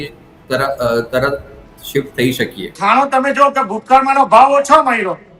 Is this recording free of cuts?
no; 1 cut; at 2.8 s

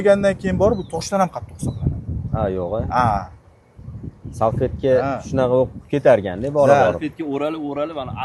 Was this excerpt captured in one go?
yes; 0 cuts

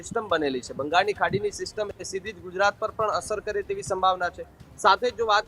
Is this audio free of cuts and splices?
yes; 0 cuts

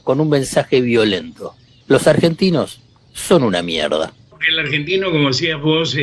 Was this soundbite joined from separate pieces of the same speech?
no; 0 cuts

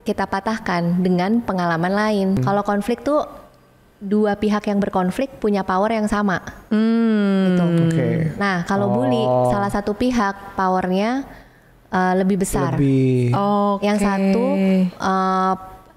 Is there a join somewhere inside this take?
yes; 1 cut; at 2.4 s

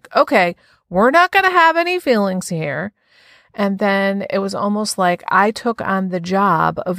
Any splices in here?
no; 0 cuts

